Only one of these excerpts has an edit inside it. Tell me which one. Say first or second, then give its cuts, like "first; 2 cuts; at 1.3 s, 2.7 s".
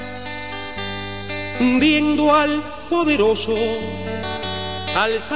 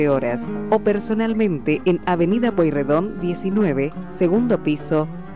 first; 1 cut; at 4.3 s